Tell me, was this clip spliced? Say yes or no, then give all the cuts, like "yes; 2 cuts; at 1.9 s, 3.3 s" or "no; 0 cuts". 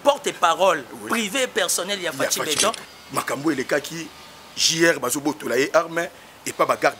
yes; 1 cut; at 2.9 s